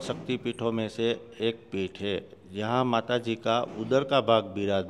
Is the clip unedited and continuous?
yes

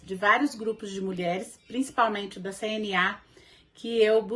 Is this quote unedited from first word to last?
yes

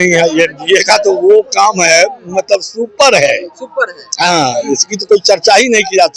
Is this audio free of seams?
yes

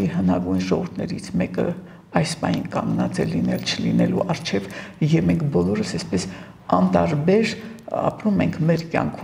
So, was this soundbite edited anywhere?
no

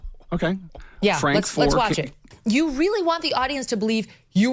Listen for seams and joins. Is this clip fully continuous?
no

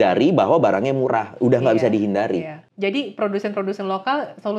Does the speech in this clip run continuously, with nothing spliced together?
no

